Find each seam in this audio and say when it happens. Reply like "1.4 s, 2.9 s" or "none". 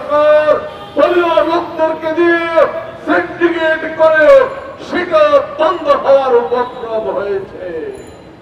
none